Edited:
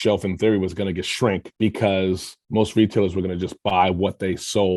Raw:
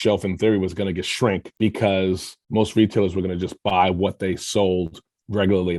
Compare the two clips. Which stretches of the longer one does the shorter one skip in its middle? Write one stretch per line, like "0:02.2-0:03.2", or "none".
none